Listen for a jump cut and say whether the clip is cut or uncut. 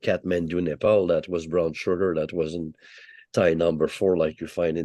uncut